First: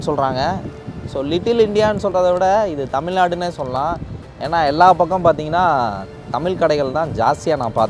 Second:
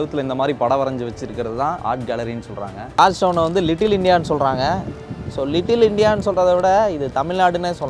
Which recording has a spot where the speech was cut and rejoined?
second; 2 cuts; at 1.8 s, 3.0 s

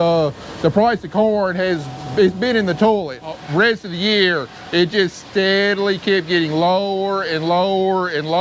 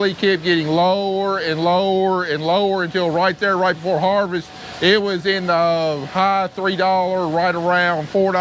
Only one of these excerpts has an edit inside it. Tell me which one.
first; 1 cut; at 3.3 s

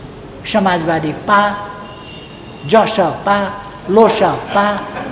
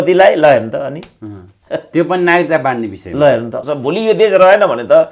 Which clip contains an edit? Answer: second; 1 cut; at 3.5 s

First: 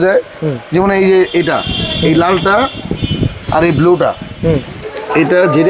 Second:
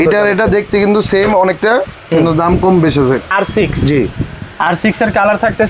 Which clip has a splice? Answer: second; 1 cut; at 3.3 s

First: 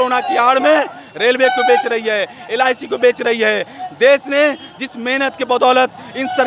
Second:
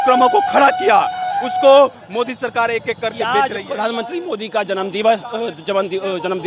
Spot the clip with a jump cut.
second; 1 cut; at 3.2 s

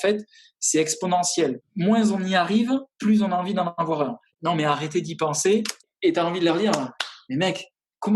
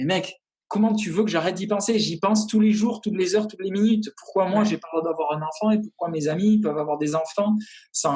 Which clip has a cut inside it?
first; 3 cuts; at 1.6 s, 4.3 s, 5.9 s

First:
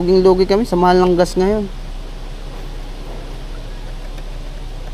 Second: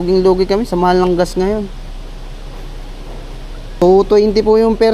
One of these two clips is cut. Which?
second; 1 cut; at 3.8 s

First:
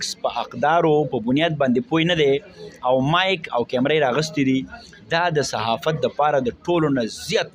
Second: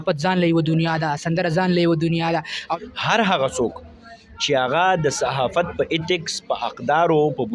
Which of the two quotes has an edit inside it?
second; 1 cut; at 2.6 s

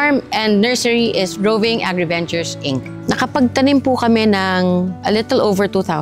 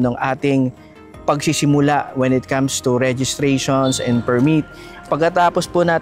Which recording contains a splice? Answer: first; 1 cut; at 2.9 s

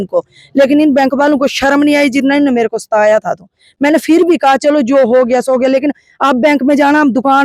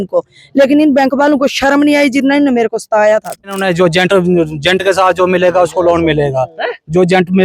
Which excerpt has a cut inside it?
second; 1 cut; at 3.6 s

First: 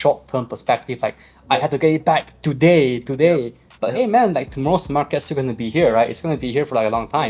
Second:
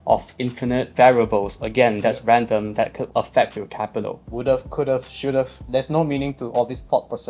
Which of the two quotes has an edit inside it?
second; 4 cuts; at 0.9 s, 3.0 s, 4.2 s, 5.6 s

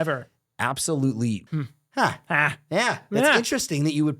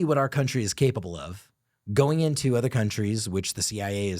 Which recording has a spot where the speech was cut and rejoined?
first; 1 cut; at 1.5 s

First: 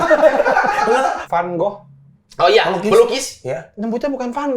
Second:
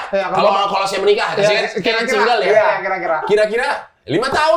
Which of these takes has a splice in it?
first; 1 cut; at 1.2 s

